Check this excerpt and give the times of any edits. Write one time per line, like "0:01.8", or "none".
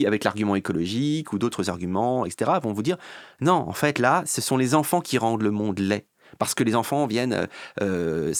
none